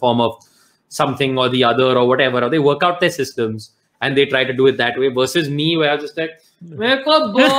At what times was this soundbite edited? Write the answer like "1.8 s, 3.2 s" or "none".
none

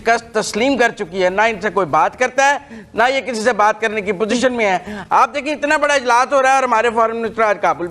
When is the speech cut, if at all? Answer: none

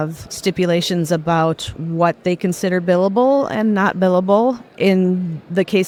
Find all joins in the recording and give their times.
none

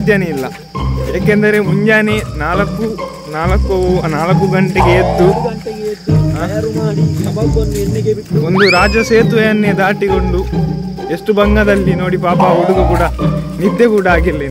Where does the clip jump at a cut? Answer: none

